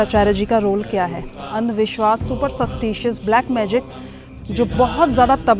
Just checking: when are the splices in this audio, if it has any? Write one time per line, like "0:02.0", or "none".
0:01.5
0:04.3